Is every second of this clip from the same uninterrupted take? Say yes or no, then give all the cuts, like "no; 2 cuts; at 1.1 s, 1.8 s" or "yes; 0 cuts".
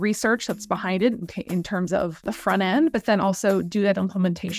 no; 1 cut; at 2.3 s